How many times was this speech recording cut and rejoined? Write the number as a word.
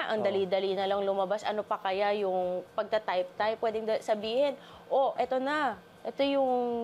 one